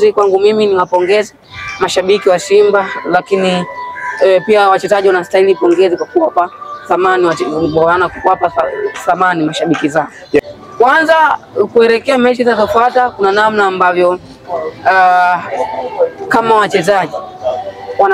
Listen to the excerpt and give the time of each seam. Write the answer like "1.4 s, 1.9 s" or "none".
10.4 s